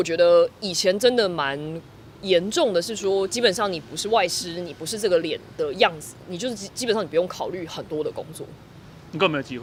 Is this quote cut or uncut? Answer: uncut